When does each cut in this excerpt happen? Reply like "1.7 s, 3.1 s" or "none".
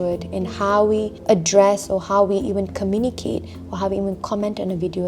1.1 s